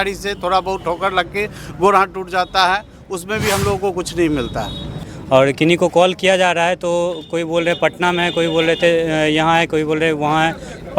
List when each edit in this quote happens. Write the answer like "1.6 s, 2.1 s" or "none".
5.1 s